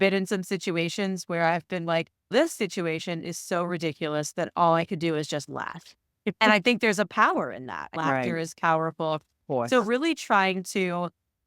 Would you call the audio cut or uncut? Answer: cut